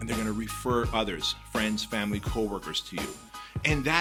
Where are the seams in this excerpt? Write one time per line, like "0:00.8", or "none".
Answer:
none